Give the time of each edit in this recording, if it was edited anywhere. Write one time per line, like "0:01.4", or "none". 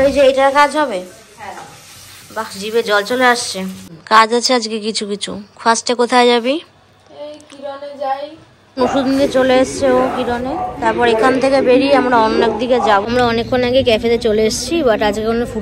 0:03.9
0:08.8
0:13.1